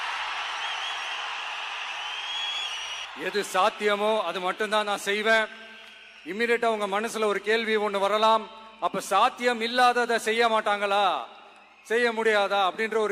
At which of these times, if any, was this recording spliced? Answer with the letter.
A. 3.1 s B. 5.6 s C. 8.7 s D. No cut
A